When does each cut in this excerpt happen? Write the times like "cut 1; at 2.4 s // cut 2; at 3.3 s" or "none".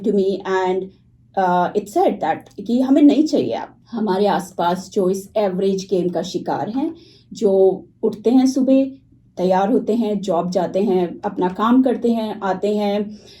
cut 1; at 3.8 s